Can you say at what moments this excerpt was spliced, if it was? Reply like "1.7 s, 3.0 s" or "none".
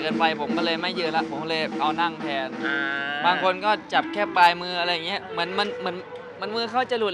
none